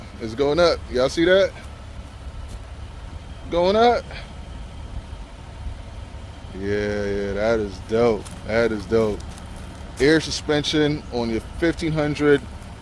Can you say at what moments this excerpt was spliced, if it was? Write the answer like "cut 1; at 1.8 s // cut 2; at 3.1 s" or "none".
none